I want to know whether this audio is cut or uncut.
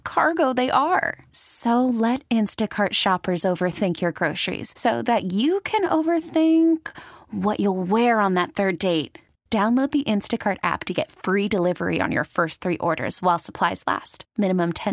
uncut